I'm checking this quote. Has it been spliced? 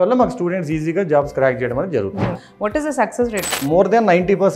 yes; 2 cuts; at 2.4 s, 3.6 s

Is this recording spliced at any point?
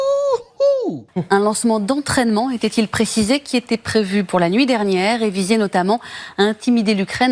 yes; 1 cut; at 1.1 s

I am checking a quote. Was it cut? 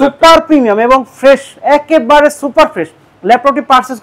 no; 0 cuts

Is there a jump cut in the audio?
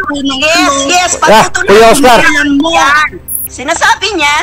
yes; 1 cut; at 3.1 s

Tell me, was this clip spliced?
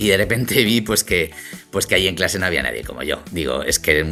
no; 0 cuts

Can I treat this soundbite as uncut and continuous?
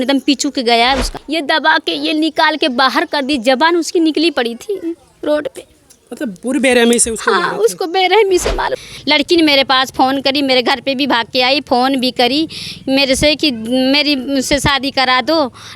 no; 2 cuts; at 1.1 s, 8.8 s

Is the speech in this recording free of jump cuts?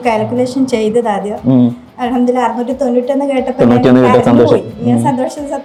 yes; 0 cuts

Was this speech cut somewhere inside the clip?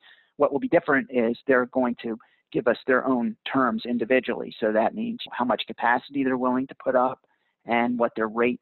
yes; 1 cut; at 5.3 s

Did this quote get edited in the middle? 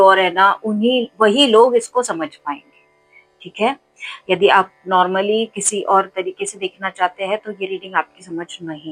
no; 0 cuts

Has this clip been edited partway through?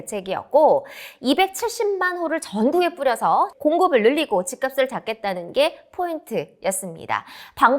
yes; 1 cut; at 3.5 s

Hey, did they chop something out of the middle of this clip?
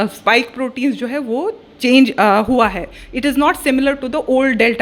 no; 0 cuts

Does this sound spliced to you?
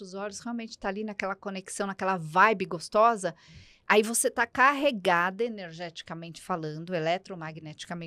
no; 0 cuts

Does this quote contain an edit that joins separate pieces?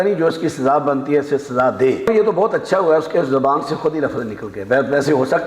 yes; 1 cut; at 2.1 s

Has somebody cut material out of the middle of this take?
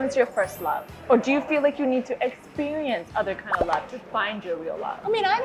no; 0 cuts

